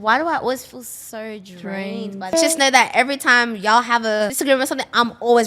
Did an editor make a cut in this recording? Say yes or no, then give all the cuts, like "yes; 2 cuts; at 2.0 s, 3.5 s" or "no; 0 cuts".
yes; 2 cuts; at 2.3 s, 4.4 s